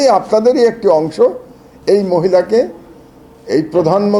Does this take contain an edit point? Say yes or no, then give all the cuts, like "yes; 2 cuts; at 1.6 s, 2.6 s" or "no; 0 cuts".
no; 0 cuts